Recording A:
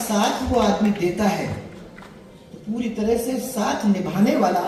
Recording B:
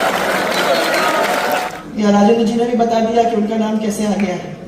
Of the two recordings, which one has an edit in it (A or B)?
B